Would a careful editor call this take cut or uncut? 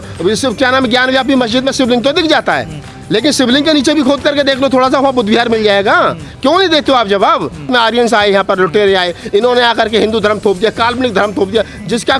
cut